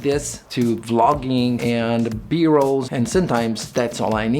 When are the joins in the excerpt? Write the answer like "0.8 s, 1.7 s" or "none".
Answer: 2.9 s